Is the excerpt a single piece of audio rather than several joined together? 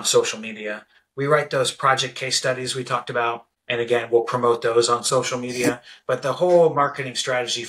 no; 1 cut; at 3.5 s

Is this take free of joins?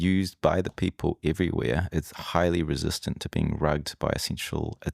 yes; 0 cuts

